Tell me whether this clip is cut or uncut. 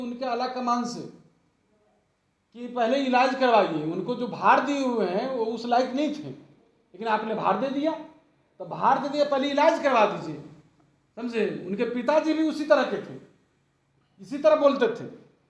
uncut